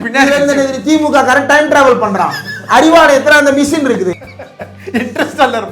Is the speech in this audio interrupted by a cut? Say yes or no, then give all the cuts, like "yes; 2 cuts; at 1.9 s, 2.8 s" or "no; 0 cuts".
yes; 1 cut; at 4.1 s